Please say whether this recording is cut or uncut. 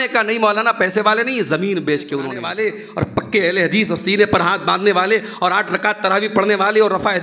cut